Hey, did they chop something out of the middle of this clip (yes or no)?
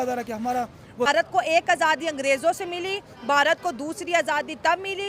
yes